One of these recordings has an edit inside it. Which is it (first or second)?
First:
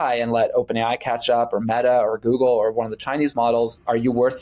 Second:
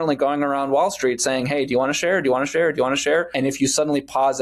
second